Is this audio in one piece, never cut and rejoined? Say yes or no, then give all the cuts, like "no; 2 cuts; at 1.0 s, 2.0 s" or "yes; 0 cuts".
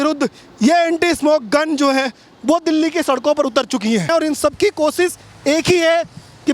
no; 1 cut; at 4.1 s